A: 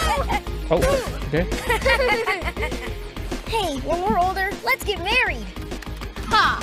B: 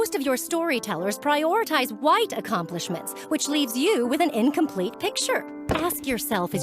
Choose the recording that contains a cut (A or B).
B